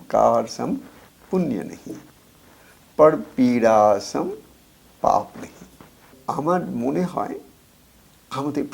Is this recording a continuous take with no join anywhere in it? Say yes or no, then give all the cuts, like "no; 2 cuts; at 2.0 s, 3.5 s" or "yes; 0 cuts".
no; 1 cut; at 6.1 s